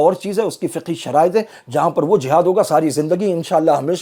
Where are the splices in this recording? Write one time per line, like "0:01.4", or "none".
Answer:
none